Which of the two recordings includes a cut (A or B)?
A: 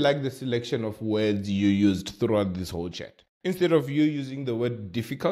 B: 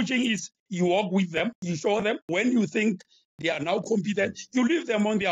B